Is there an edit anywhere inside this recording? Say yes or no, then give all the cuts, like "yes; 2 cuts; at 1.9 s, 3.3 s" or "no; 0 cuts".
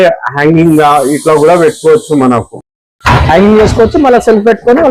no; 0 cuts